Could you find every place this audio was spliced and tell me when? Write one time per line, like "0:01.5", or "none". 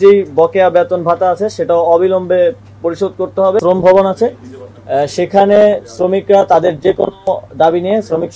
0:03.6

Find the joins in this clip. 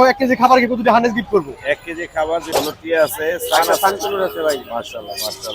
0:02.5

